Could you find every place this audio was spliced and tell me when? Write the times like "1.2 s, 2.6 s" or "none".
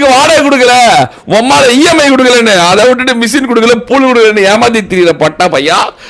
none